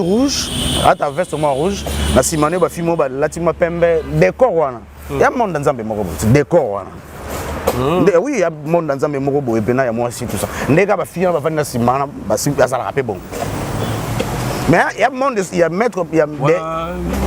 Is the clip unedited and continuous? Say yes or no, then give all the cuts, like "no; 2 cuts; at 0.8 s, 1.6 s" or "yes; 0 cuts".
yes; 0 cuts